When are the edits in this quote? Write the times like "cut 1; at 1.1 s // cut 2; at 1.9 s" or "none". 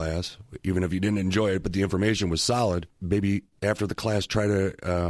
cut 1; at 2.9 s